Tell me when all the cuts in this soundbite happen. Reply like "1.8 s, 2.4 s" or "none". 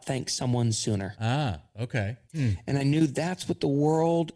1.1 s, 2.2 s